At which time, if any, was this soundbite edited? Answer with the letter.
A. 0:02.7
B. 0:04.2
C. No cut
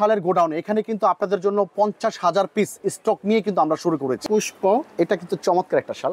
B